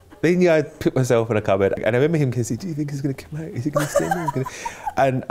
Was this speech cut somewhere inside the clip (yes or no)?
no